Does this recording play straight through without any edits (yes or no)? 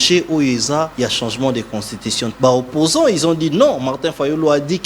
no